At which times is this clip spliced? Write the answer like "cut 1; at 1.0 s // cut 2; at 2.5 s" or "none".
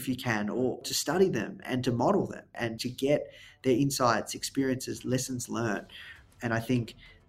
cut 1; at 0.8 s // cut 2; at 1.6 s // cut 3; at 2.6 s // cut 4; at 6.2 s